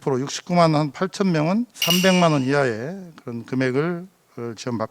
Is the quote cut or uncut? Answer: cut